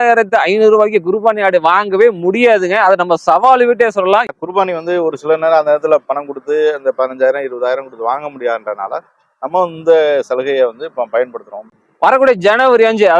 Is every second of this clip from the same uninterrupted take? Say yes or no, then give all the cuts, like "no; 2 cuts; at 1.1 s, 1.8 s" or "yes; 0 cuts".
no; 2 cuts; at 4.3 s, 11.6 s